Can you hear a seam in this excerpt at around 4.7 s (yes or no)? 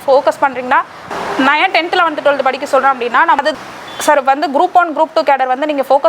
no